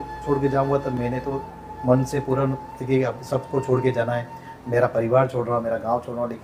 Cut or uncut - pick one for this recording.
uncut